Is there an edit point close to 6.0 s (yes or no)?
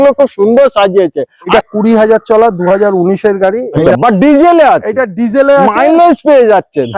no